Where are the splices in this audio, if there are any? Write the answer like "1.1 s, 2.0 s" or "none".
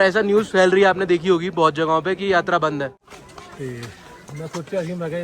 3.0 s